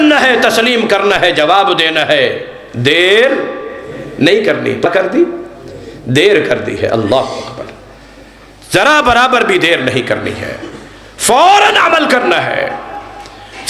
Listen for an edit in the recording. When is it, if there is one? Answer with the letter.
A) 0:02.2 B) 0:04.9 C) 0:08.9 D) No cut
B